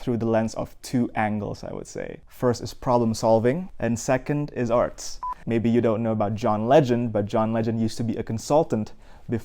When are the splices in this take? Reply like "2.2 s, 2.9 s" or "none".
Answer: 2.2 s, 3.7 s, 5.3 s